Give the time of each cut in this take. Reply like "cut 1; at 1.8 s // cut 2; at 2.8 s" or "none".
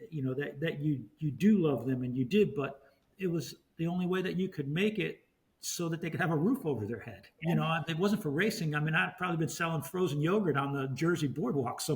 cut 1; at 7.3 s